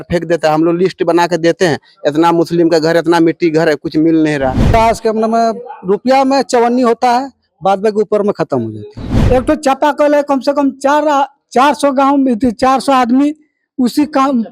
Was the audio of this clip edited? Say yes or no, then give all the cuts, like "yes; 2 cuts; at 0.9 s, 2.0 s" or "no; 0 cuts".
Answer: yes; 3 cuts; at 4.7 s, 9.1 s, 13.0 s